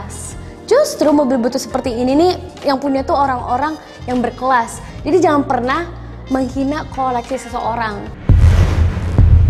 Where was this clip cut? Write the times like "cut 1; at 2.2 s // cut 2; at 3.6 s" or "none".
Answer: cut 1; at 2.5 s // cut 2; at 4.9 s // cut 3; at 8.1 s